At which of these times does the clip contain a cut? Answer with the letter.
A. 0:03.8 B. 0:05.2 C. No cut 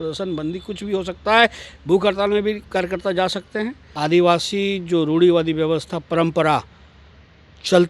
A